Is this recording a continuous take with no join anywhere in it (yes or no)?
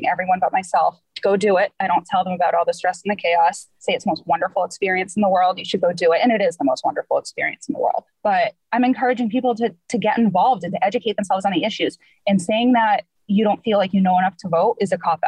yes